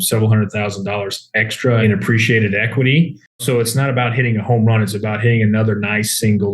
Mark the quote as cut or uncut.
cut